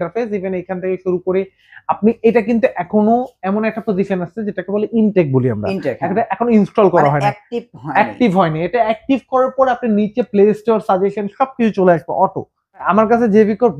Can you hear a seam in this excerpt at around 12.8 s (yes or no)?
yes